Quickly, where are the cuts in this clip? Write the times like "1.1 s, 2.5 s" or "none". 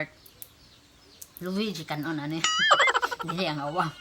none